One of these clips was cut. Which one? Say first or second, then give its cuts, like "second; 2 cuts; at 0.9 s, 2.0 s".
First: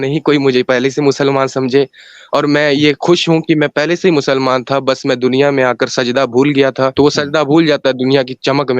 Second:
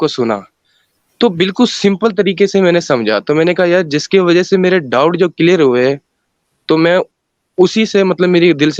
first; 1 cut; at 6.9 s